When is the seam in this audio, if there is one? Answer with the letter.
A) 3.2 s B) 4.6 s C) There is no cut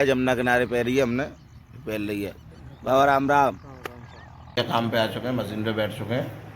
B